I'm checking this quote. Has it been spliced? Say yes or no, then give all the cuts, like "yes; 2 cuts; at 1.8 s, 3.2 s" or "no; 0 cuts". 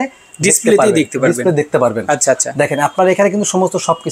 no; 0 cuts